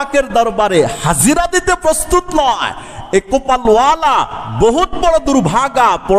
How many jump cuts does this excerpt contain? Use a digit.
0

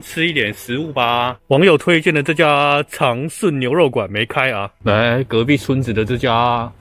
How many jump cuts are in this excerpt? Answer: 2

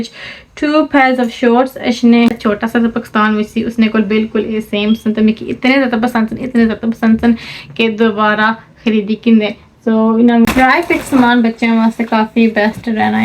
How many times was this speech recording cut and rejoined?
2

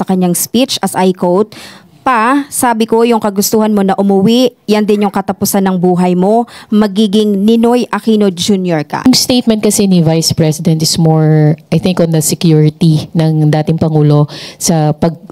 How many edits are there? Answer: 1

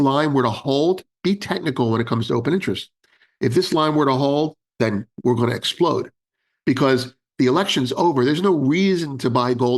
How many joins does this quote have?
1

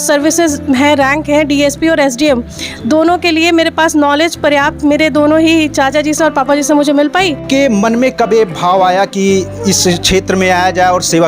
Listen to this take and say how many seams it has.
1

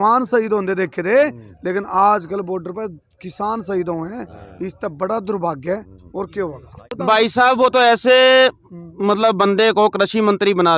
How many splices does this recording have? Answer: 1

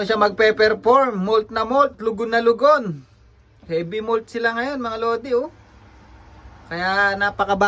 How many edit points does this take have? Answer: 0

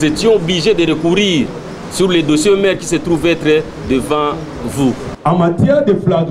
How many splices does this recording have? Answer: 1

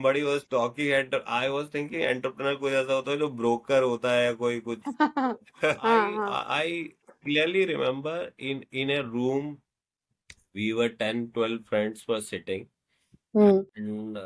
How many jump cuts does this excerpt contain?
1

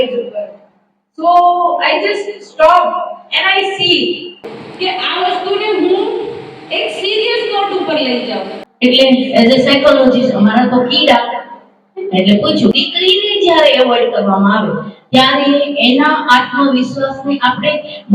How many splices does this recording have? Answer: 3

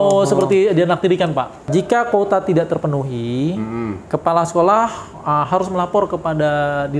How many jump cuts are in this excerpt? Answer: 1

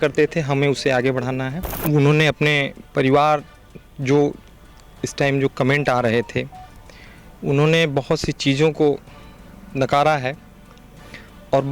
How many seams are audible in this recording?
1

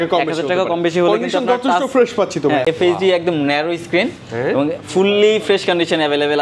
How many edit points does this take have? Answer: 1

